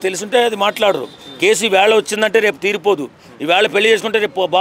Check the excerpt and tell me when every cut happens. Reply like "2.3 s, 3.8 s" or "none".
none